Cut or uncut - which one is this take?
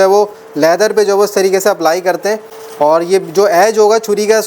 uncut